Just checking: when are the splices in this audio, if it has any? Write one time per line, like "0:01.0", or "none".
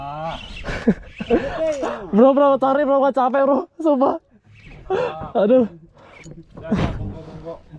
none